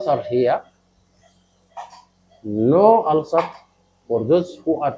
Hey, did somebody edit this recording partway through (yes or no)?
no